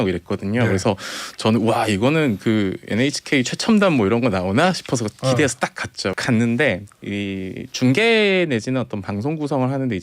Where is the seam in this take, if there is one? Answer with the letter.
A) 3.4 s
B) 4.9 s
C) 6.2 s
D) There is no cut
C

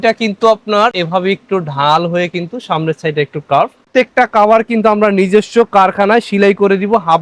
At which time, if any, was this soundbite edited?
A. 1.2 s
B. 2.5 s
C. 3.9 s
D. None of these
C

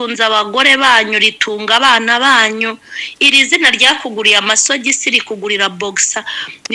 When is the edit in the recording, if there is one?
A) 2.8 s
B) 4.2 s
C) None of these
C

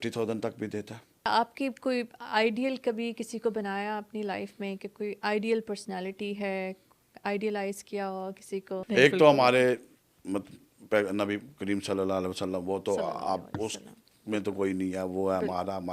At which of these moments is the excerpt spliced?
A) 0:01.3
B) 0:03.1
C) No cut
A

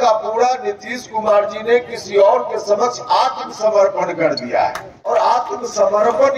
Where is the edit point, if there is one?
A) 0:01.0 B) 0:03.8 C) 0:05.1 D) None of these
C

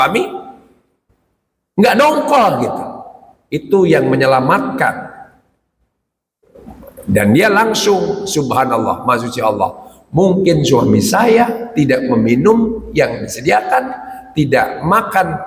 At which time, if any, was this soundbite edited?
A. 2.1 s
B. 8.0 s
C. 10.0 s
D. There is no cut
D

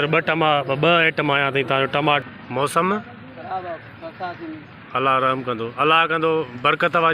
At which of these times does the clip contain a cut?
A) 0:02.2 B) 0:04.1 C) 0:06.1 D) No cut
A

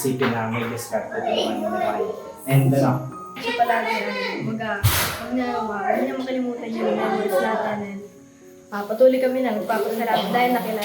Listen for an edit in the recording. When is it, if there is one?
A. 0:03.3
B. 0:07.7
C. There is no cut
A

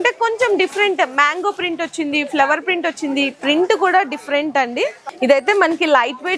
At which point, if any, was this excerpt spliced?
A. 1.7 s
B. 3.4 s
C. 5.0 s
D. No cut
C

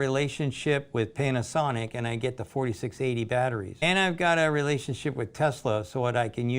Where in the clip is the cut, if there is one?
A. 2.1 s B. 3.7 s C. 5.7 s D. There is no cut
B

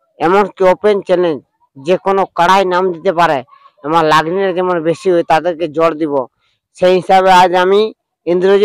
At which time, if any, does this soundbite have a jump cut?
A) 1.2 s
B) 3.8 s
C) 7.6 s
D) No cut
D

